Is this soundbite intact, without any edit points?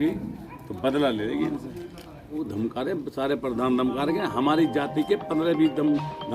no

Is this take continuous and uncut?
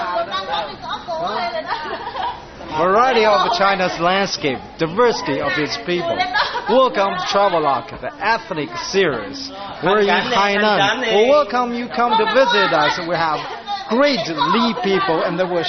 no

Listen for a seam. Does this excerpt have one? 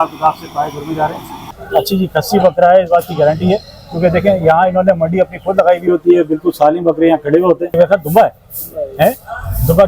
yes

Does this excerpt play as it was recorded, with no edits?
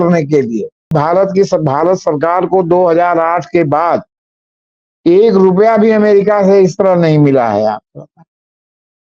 no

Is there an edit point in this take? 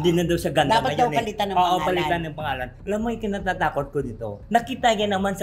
no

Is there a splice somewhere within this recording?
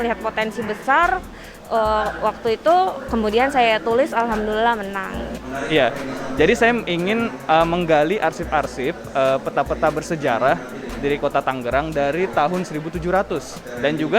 no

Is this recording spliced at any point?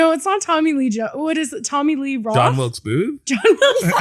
no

